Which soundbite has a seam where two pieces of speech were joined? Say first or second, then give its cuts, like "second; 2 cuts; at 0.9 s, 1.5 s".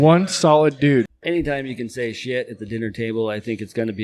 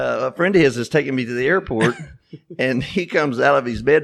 first; 1 cut; at 1.1 s